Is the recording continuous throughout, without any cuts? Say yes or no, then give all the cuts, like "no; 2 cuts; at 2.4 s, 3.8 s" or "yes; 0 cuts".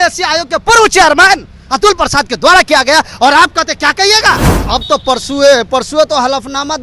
no; 1 cut; at 4.5 s